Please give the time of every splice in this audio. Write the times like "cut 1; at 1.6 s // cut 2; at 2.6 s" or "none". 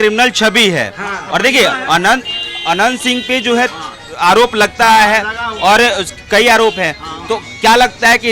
none

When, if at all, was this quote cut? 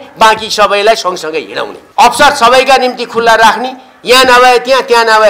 cut 1; at 1.8 s

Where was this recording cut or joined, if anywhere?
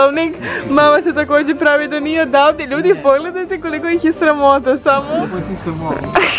cut 1; at 5.3 s

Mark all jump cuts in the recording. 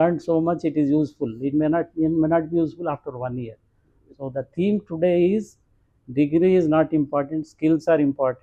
none

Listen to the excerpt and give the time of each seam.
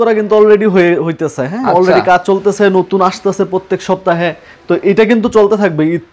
none

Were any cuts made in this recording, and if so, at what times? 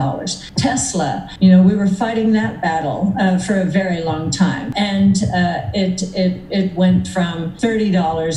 cut 1; at 4.7 s

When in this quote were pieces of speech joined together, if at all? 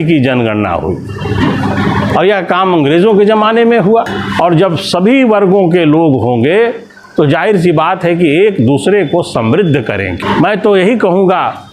cut 1; at 4.2 s // cut 2; at 10.2 s

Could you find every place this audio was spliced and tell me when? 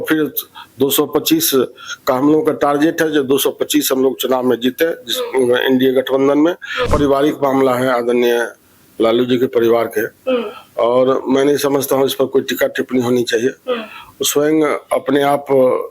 cut 1; at 6.9 s

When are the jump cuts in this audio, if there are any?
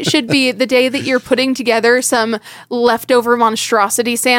none

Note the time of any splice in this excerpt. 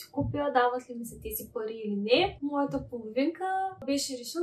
cut 1; at 2.4 s

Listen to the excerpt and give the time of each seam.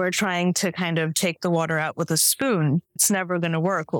cut 1; at 3.0 s

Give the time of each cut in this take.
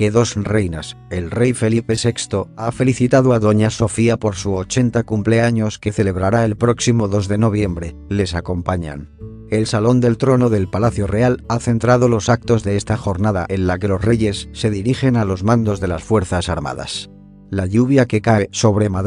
cut 1; at 9.1 s

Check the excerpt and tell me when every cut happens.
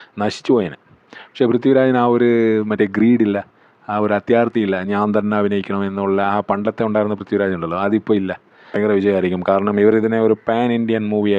cut 1; at 8.7 s

